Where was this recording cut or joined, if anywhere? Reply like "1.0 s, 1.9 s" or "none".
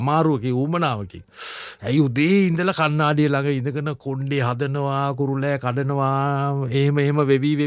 none